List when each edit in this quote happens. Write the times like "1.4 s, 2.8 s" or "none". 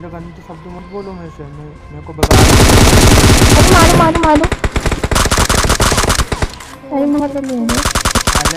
7.4 s